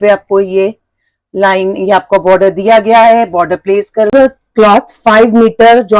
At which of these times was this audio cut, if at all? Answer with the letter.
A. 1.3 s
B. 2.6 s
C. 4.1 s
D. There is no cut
C